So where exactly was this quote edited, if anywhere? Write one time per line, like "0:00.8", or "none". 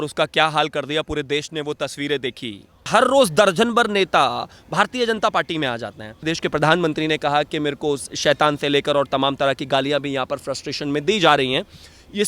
0:02.9
0:06.2